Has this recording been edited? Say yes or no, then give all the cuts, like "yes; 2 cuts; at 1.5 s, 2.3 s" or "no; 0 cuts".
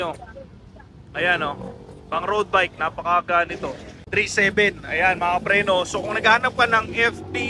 yes; 1 cut; at 3.9 s